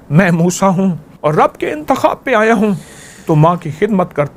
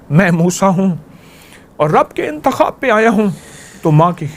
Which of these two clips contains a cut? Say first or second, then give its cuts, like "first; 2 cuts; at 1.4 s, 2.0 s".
first; 1 cut; at 1.1 s